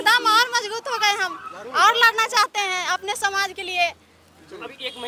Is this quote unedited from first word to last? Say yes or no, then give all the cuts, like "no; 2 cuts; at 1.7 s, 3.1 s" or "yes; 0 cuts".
yes; 0 cuts